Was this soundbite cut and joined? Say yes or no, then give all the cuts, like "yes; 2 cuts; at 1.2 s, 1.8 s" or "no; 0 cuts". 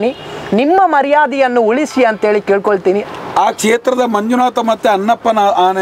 yes; 1 cut; at 3.0 s